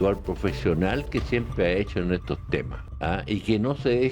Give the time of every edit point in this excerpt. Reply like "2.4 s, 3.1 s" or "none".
2.8 s